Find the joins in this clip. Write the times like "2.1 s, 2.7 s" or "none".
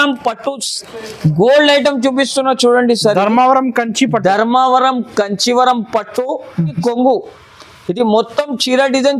6.8 s